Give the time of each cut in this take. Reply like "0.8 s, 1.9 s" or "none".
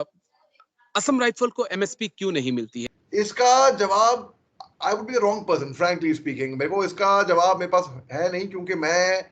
2.8 s